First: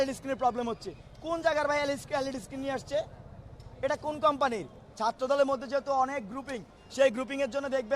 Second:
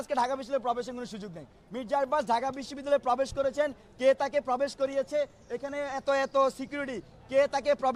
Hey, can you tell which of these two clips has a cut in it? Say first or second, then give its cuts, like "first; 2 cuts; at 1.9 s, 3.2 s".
first; 1 cut; at 4.8 s